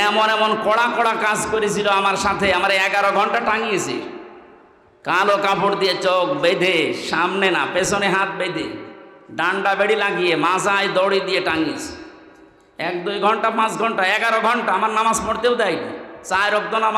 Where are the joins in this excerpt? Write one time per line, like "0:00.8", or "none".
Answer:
none